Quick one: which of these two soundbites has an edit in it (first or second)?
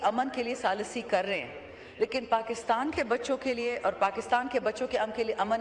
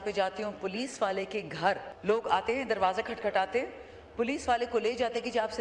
second